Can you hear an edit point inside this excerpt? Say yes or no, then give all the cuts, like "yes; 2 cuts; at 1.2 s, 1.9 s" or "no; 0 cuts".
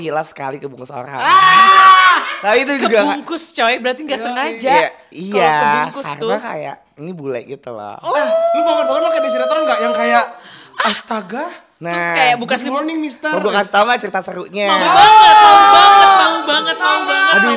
no; 0 cuts